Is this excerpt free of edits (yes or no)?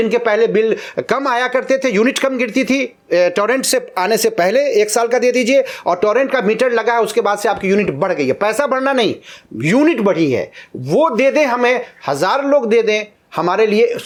yes